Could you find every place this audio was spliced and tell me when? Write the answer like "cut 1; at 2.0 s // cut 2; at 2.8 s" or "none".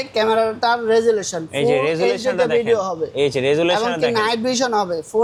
none